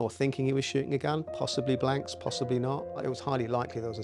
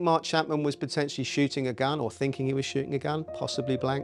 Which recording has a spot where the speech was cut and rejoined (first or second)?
first